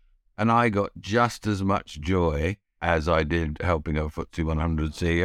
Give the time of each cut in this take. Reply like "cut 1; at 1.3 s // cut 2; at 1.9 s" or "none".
cut 1; at 2.7 s